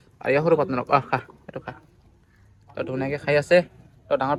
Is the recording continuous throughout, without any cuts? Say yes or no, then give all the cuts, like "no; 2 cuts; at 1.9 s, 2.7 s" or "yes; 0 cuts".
yes; 0 cuts